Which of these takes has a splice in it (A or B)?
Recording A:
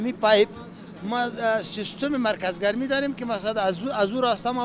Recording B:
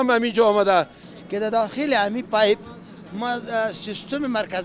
B